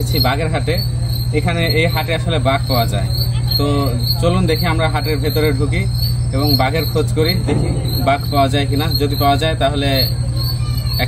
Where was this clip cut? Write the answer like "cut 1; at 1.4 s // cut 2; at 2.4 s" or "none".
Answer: none

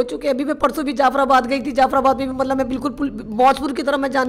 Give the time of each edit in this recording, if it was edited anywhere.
none

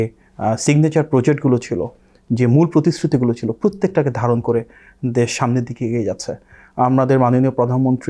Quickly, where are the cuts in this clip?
none

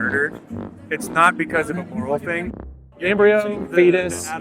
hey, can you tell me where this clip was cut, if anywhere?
cut 1; at 2.5 s

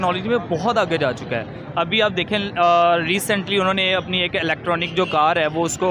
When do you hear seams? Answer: none

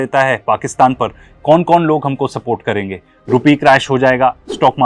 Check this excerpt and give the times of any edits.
none

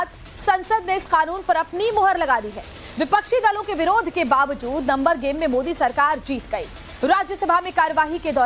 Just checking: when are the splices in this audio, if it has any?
cut 1; at 4.8 s

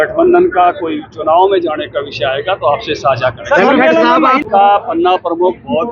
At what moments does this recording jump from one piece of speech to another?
cut 1; at 4.5 s

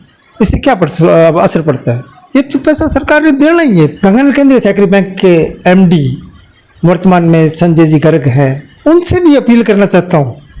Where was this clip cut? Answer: cut 1; at 3.9 s

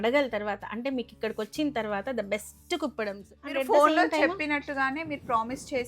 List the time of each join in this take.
cut 1; at 3.6 s

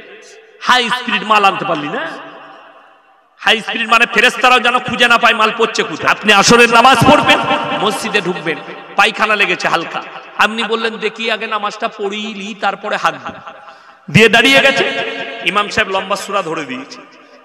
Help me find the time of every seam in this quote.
cut 1; at 6.0 s

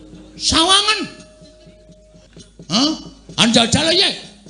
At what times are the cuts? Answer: cut 1; at 2.1 s

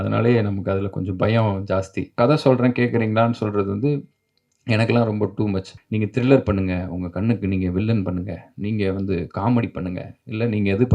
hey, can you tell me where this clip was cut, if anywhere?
cut 1; at 2.0 s // cut 2; at 5.8 s

